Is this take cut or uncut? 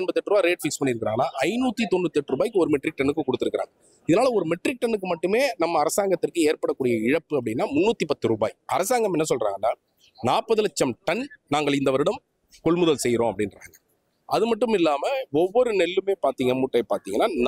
uncut